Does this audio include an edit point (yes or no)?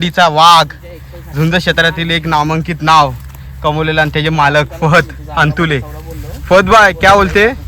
no